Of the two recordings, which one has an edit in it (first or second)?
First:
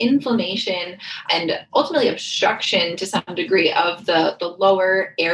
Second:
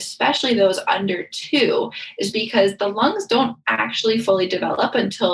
first